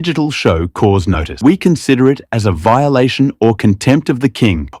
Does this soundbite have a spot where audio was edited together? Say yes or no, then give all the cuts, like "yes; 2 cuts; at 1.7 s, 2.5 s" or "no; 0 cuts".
yes; 1 cut; at 1.3 s